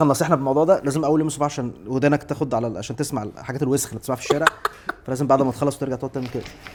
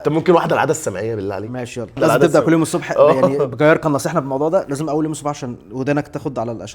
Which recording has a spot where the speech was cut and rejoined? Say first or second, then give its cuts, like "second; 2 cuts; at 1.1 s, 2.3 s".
second; 1 cut; at 2.0 s